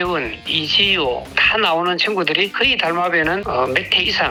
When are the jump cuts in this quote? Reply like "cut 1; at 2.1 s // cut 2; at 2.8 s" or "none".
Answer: none